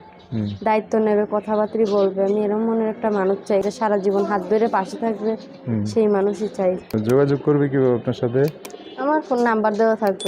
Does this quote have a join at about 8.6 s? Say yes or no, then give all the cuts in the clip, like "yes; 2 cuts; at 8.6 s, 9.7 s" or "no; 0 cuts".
no; 2 cuts; at 3.6 s, 6.8 s